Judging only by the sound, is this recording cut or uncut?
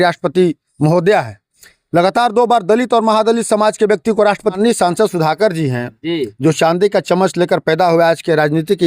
cut